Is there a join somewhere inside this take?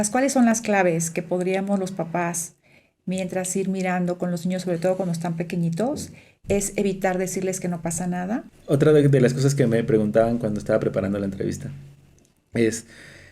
yes; 1 cut; at 8.5 s

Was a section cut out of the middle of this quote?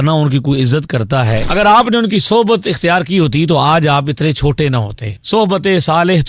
yes; 1 cut; at 1.4 s

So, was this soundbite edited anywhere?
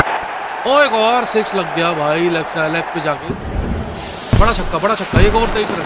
no; 0 cuts

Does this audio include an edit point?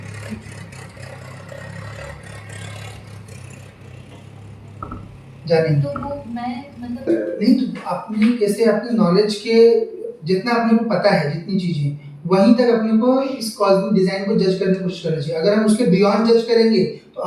yes; 1 cut; at 7.1 s

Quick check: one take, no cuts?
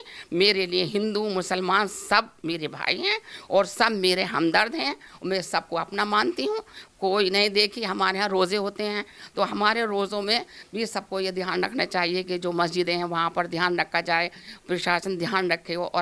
yes; 0 cuts

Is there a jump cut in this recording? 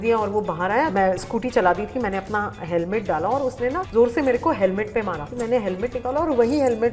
yes; 1 cut; at 5.2 s

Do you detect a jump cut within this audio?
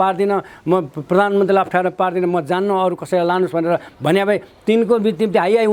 no; 0 cuts

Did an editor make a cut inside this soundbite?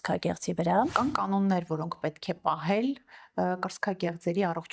yes; 1 cut; at 0.9 s

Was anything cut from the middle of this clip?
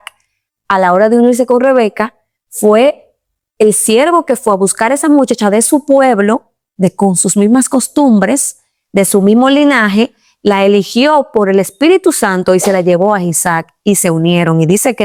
no; 0 cuts

